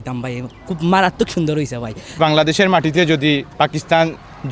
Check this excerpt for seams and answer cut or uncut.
cut